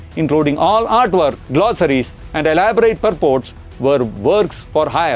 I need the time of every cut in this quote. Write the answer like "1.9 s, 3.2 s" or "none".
1.4 s